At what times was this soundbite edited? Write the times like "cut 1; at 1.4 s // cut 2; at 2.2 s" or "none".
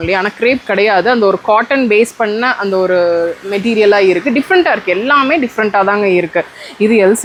none